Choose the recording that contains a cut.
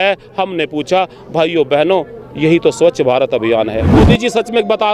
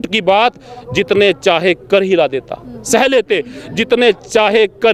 first; 1 cut; at 3.9 s

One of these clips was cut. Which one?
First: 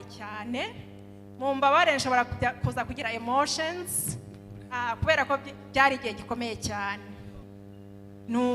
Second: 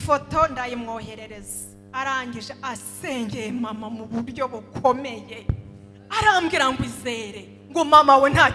first; 1 cut; at 7.4 s

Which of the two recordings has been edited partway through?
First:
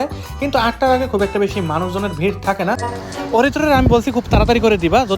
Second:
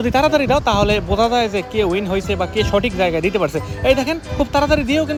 first; 1 cut; at 2.8 s

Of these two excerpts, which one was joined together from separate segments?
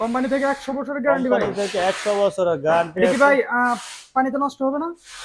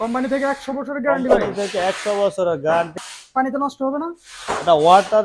second; 1 cut; at 2.9 s

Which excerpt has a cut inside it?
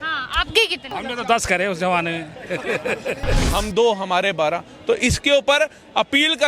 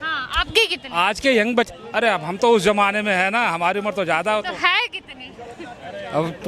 first; 2 cuts; at 0.9 s, 3.4 s

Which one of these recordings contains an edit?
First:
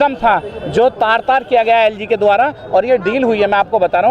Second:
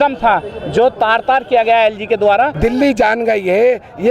second; 1 cut; at 2.5 s

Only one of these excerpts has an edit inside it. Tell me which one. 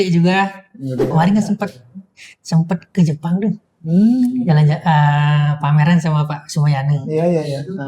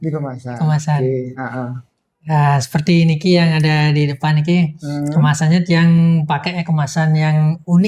first; 1 cut; at 1.1 s

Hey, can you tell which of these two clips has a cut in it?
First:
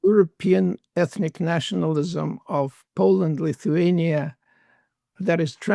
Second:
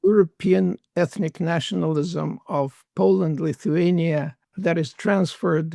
second; 1 cut; at 4.4 s

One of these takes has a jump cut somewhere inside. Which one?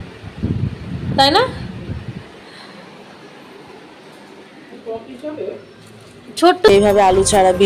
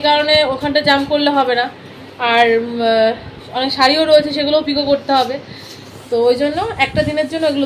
first; 1 cut; at 6.7 s

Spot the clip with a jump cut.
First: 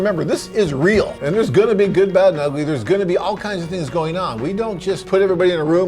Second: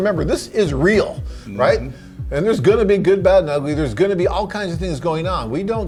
first; 2 cuts; at 1.2 s, 5.0 s

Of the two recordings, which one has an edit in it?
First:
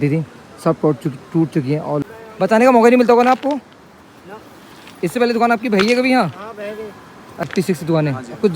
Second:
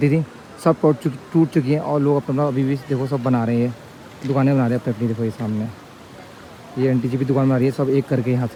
first; 2 cuts; at 2.0 s, 7.5 s

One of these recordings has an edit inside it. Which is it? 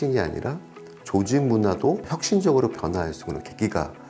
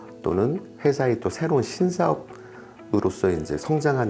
first; 1 cut; at 2.1 s

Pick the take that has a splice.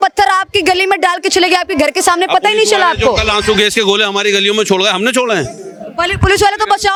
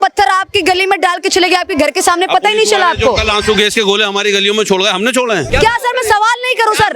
second; 1 cut; at 5.5 s

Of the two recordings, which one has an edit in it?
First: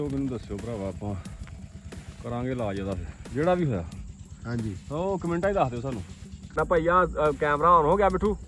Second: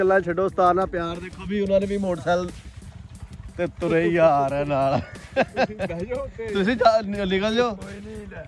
first; 1 cut; at 6.6 s

